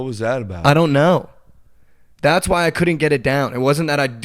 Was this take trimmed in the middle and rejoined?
yes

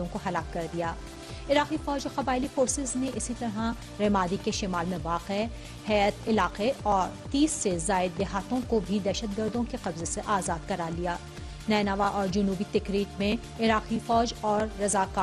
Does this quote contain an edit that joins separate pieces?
yes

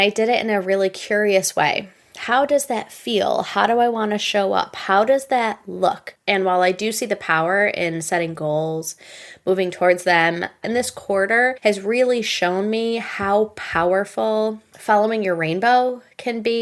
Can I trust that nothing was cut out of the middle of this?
no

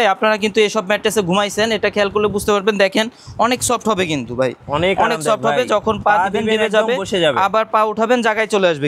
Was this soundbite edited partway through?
no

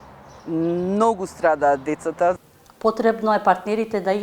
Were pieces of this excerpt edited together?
yes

